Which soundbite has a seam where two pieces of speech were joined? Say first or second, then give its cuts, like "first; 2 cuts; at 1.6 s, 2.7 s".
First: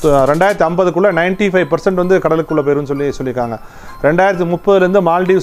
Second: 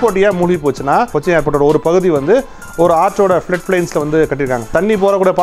second; 2 cuts; at 1.1 s, 4.7 s